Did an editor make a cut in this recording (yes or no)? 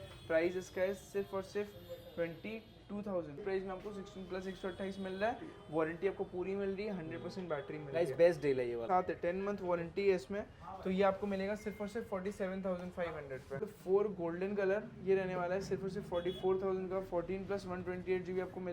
yes